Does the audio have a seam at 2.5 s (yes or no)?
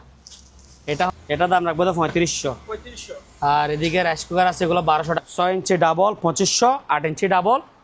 no